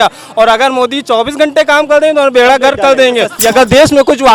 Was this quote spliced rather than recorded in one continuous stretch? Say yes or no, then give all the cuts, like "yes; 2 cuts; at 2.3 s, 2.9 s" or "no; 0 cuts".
yes; 1 cut; at 3.4 s